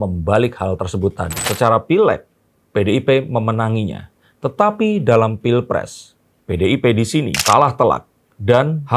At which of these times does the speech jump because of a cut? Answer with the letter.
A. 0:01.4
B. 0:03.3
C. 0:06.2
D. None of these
A